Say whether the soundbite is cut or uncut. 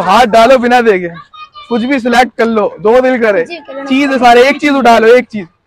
uncut